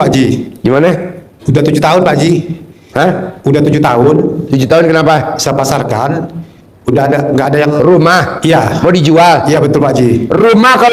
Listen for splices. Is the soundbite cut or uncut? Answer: uncut